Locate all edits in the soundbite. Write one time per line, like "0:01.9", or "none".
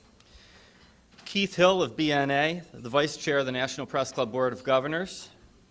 0:02.7